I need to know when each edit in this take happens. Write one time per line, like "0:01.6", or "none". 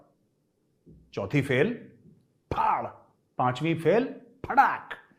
none